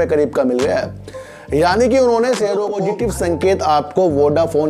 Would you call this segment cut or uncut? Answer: cut